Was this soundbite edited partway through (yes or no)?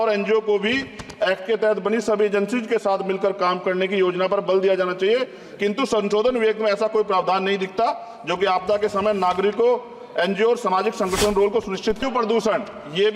yes